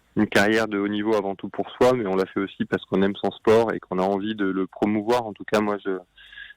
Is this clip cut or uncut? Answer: uncut